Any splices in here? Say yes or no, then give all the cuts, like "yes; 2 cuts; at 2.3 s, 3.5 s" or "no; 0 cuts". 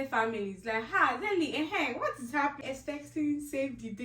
yes; 1 cut; at 2.6 s